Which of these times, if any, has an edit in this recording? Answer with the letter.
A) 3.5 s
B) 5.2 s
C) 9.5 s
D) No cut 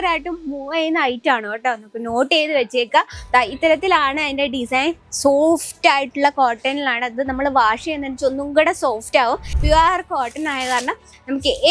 C